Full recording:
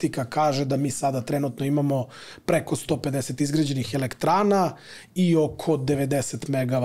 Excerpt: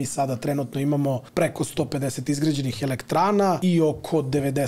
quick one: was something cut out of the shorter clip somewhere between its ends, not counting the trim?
yes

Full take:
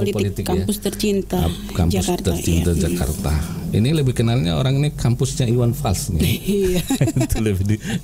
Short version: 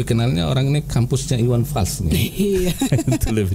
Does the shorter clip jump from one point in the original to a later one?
no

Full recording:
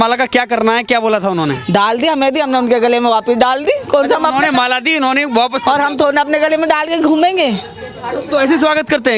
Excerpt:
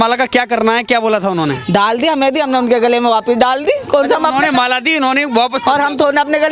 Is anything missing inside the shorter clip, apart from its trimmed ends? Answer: no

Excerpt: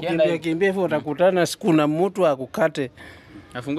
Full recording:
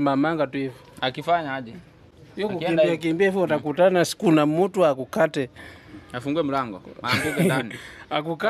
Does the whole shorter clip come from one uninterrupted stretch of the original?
yes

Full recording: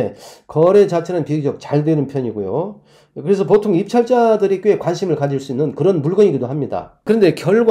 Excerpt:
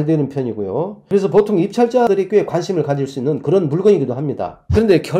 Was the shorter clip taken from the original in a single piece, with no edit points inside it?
no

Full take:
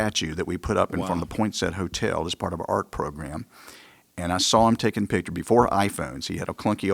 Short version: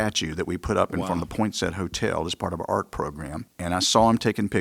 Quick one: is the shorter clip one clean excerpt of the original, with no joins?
no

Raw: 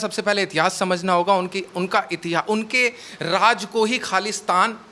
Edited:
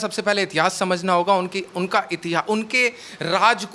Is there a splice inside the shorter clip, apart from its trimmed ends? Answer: no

